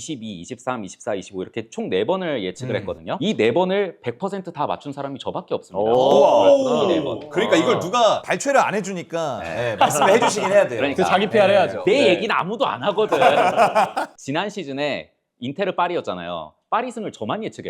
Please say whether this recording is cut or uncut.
cut